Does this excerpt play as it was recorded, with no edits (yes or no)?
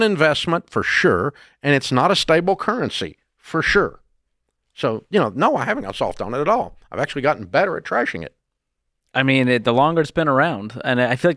yes